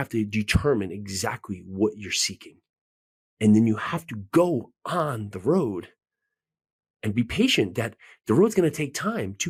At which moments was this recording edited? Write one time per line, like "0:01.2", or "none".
none